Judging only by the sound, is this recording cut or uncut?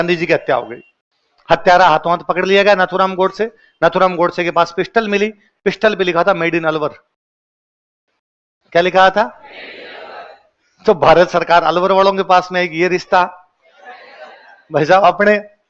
uncut